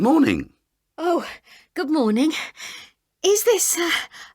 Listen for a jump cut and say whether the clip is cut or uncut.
cut